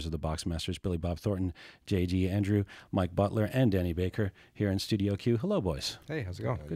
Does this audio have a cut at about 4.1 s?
yes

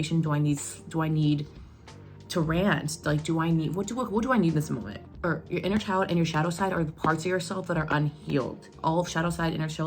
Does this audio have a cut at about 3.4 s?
no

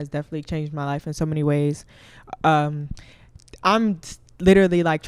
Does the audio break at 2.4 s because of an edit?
no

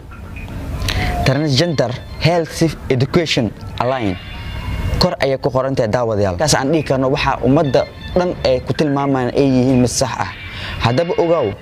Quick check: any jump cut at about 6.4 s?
yes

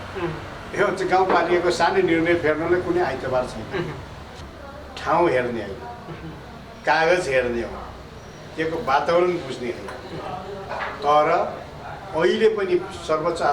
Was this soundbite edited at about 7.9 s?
no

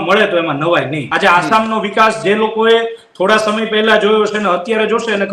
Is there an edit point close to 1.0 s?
yes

